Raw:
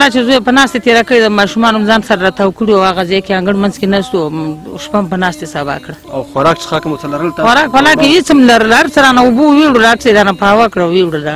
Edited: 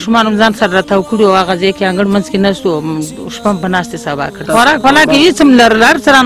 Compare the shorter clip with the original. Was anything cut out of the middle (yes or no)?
yes